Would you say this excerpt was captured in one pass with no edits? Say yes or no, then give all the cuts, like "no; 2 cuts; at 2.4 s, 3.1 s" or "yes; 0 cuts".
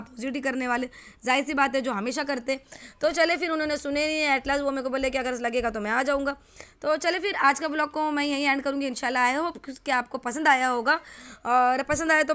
yes; 0 cuts